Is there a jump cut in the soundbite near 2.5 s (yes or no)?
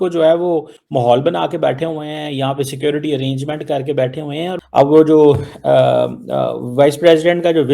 no